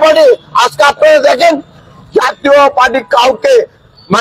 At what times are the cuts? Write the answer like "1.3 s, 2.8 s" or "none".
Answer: none